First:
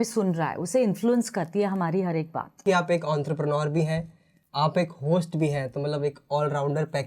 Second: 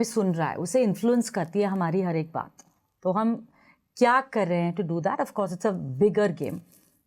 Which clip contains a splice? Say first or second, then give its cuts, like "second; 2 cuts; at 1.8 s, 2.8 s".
first; 1 cut; at 2.6 s